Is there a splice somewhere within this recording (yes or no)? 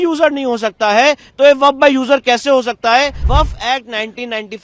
yes